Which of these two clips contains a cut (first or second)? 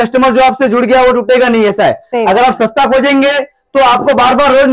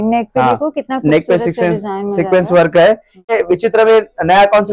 second